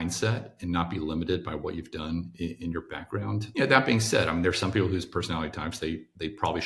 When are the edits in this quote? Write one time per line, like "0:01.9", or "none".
0:03.5